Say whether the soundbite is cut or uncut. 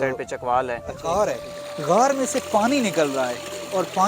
cut